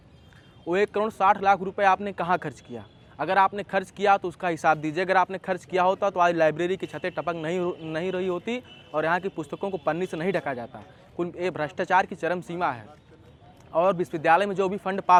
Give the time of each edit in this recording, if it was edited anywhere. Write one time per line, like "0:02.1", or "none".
none